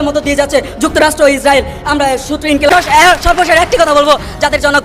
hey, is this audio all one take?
no; 1 cut; at 2.2 s

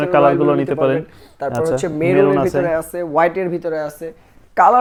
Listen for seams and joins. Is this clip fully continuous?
yes; 0 cuts

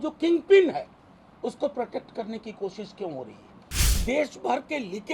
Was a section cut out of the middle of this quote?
yes; 1 cut; at 4.0 s

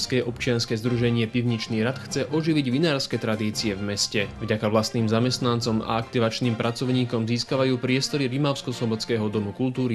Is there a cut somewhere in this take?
no; 0 cuts

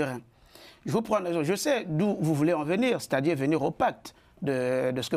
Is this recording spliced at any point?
no; 0 cuts

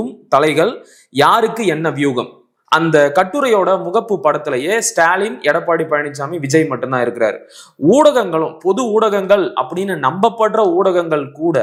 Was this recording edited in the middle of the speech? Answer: no; 0 cuts

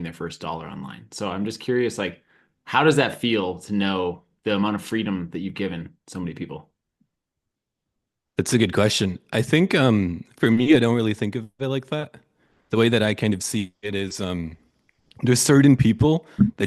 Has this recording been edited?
no; 0 cuts

